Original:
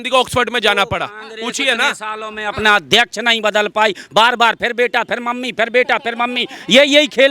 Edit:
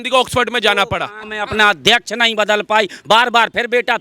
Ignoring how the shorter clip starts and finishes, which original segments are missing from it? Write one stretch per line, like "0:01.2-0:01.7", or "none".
0:01.2-0:02.3